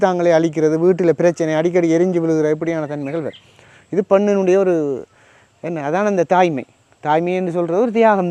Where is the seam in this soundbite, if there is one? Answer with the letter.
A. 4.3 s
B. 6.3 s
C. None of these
C